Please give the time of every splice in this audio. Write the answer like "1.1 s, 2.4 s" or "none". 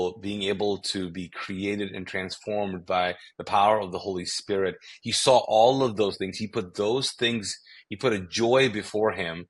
none